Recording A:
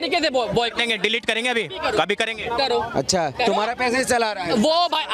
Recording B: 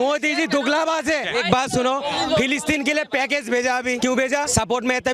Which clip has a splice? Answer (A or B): B